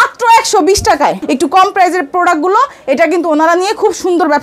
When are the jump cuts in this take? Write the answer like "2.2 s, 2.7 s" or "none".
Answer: 1.2 s